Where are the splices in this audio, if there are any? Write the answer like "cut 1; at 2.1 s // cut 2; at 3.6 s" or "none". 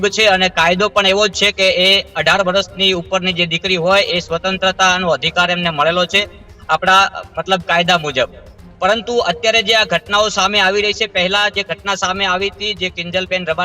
none